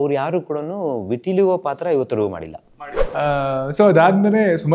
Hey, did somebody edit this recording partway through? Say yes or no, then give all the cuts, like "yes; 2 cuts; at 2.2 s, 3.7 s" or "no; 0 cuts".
yes; 1 cut; at 3.3 s